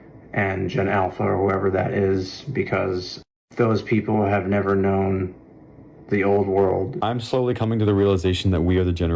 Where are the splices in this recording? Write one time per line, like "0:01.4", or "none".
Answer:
0:06.9